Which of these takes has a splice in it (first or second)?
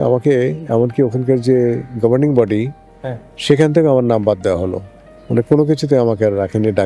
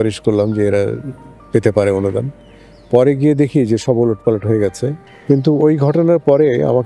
second